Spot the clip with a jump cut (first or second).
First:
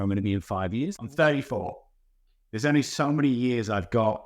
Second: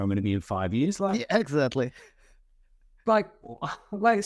first